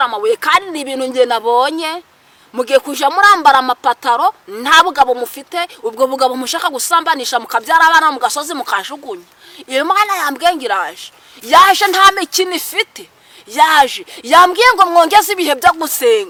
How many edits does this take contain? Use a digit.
0